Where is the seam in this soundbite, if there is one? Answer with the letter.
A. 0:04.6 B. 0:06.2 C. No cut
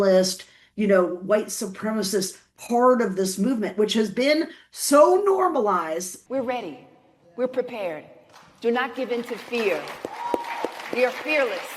B